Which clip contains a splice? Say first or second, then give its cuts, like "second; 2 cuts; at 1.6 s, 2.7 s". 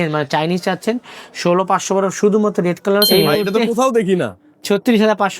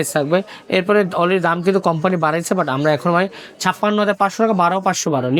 first; 1 cut; at 3.2 s